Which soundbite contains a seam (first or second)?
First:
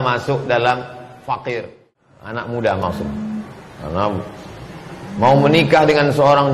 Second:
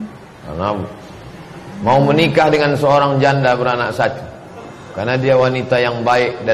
first